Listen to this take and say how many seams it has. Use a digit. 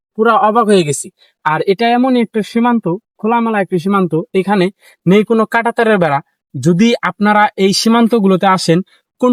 0